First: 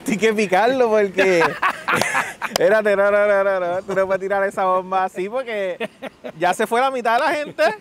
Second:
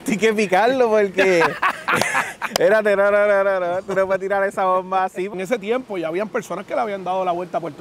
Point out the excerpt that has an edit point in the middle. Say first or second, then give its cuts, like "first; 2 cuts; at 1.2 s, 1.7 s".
second; 1 cut; at 5.3 s